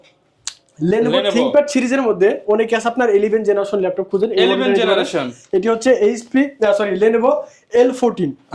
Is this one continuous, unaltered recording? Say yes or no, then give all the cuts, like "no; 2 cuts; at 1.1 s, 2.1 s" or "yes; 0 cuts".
yes; 0 cuts